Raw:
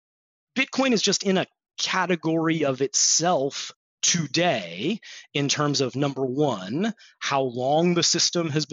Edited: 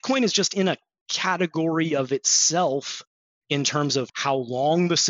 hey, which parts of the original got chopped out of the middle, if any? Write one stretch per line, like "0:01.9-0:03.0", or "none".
0:04.0-0:05.1
0:05.9-0:07.1

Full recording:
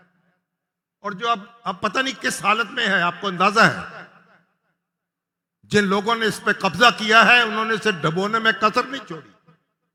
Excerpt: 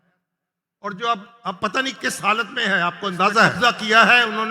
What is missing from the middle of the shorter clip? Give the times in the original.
0:03.8-0:06.7

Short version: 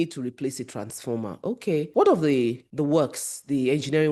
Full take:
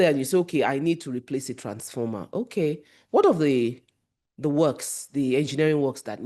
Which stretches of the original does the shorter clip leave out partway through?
0:02.8-0:03.1
0:03.8-0:04.3

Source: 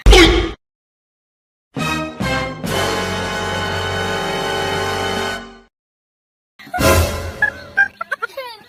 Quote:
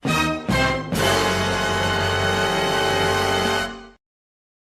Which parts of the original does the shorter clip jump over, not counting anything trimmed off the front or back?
none

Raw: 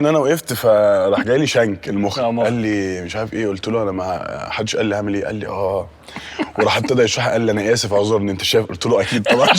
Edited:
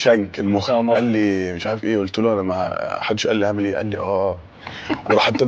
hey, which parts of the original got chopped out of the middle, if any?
none

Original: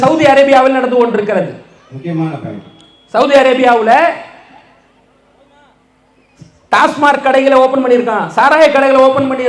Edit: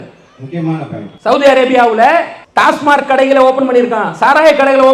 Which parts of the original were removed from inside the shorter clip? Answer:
0:02.6-0:02.9
0:04.3-0:06.5

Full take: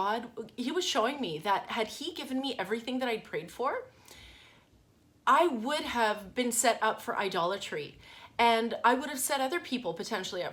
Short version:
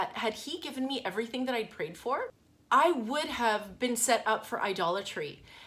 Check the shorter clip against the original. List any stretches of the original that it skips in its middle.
0:04.0-0:05.0

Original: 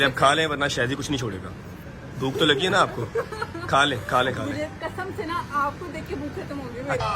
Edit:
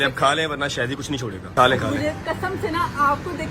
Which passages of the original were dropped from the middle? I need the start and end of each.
0:01.5-0:04.0

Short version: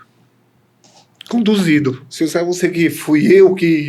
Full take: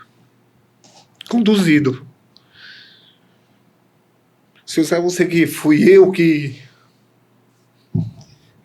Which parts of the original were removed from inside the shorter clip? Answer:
0:02.1-0:04.6

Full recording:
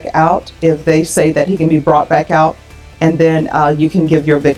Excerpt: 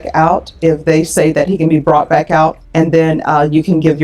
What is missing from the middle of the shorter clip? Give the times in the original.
0:02.6-0:02.9

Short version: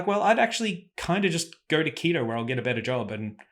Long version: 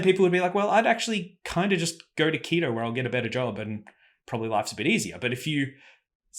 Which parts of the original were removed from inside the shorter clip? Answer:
none

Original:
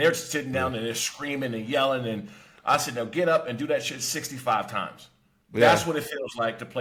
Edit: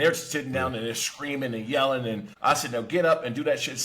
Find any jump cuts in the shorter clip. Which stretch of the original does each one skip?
0:02.3-0:02.5

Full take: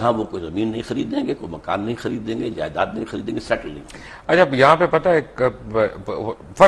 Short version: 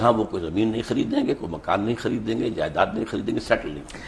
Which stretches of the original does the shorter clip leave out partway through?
none

